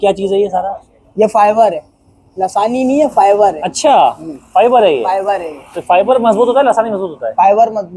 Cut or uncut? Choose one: uncut